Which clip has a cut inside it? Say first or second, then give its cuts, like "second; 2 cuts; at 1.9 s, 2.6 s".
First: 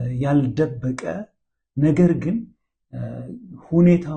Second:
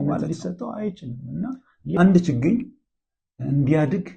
second; 1 cut; at 2.0 s